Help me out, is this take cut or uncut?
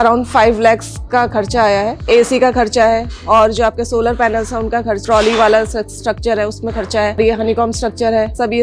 cut